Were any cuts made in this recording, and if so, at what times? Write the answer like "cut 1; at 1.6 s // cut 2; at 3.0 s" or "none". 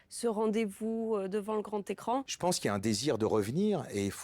cut 1; at 2.3 s